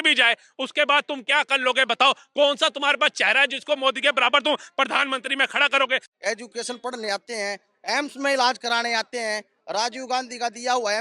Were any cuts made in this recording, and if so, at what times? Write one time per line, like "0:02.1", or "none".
0:06.1